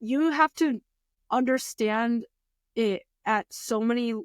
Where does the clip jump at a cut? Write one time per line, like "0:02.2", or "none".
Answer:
0:01.1